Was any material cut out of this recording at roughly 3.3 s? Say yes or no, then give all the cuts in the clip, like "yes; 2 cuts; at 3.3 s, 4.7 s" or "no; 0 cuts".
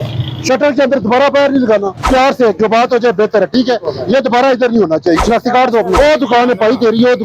no; 2 cuts; at 2.1 s, 5.5 s